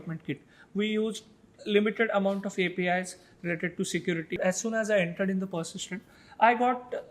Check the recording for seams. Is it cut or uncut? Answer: cut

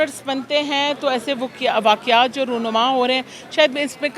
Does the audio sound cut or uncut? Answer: uncut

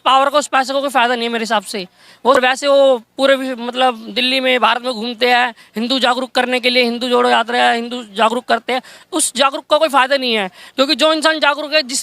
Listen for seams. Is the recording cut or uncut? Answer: cut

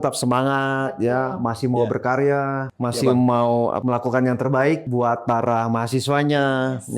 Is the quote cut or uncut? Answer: cut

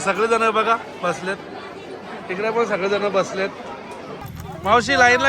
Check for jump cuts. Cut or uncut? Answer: cut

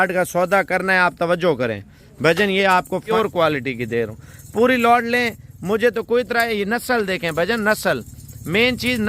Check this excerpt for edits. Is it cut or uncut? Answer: cut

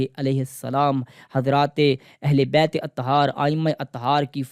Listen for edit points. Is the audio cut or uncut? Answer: uncut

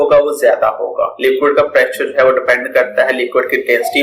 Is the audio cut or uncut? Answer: cut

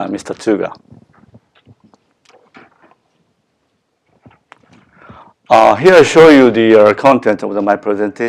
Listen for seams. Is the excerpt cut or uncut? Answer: uncut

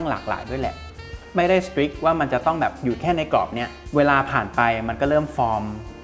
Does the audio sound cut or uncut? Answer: cut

